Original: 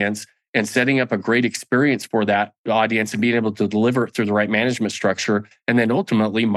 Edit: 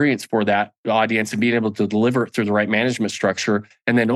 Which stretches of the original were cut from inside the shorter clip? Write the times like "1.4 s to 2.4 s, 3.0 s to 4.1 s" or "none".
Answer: none

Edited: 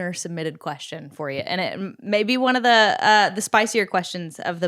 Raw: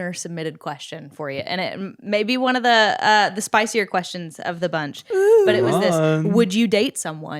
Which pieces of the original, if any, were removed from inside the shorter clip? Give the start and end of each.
none

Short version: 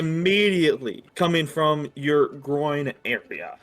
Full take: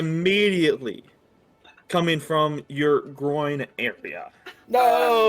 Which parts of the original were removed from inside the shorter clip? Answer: 1.0 s to 1.7 s

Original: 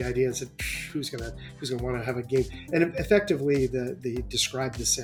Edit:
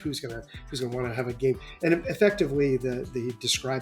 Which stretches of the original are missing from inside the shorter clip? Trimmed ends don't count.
none

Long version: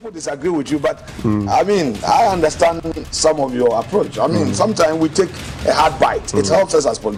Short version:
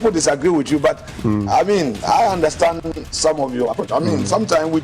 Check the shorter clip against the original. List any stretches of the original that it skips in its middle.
3.6 s to 3.9 s

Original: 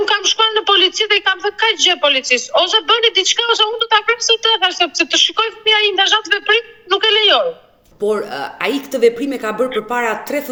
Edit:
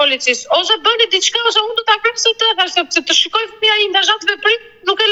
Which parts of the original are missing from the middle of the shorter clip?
none

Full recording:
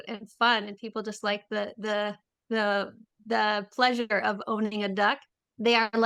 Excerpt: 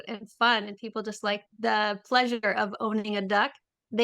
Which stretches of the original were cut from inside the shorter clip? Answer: 1.5 s to 3.1 s

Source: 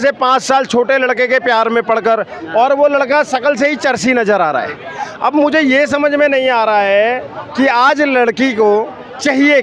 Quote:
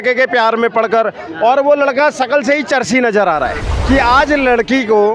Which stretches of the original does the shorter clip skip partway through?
4.8 s to 7.4 s

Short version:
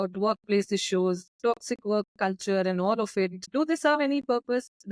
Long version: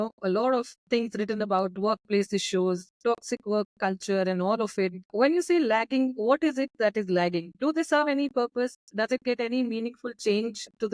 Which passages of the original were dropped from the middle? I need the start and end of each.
5.0 s to 7.5 s

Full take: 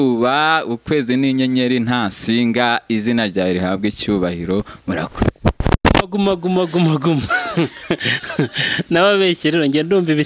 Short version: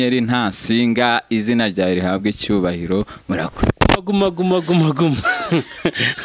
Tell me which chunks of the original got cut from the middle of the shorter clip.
5.4 s to 5.9 s

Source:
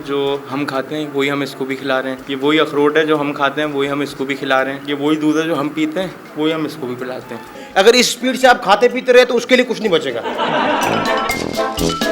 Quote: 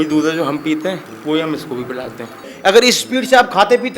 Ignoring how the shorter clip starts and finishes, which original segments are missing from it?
none

